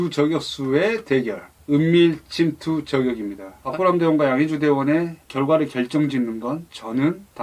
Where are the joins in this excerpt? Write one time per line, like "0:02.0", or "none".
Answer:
0:03.6